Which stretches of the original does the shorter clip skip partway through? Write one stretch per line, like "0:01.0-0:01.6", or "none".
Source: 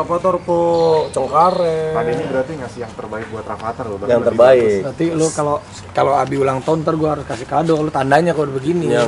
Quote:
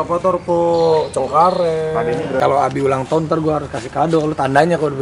0:02.4-0:06.0